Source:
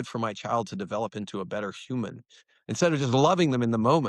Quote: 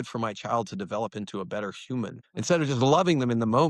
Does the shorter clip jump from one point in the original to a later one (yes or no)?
yes